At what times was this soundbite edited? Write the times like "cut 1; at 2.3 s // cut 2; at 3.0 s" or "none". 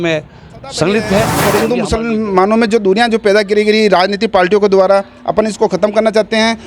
cut 1; at 1.4 s